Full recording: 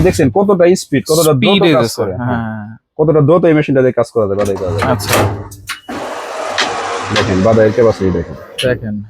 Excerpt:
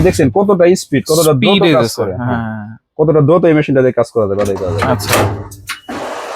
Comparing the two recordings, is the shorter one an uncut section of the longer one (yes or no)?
yes